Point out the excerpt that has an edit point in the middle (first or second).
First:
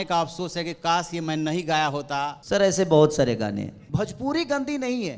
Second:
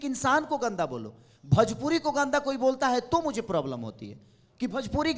first